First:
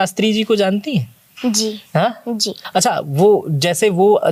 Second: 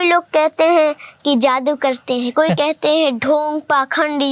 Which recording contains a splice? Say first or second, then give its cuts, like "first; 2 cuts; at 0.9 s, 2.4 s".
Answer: first; 1 cut; at 2.5 s